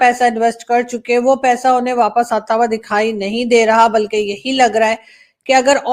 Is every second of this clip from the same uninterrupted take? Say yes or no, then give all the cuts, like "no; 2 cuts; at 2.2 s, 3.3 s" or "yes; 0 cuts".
yes; 0 cuts